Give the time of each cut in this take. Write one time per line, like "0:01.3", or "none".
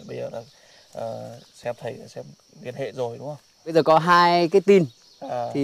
0:03.7